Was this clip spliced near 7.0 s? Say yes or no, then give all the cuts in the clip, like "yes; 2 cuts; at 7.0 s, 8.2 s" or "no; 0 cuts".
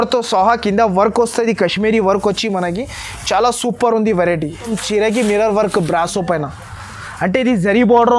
no; 1 cut; at 4.8 s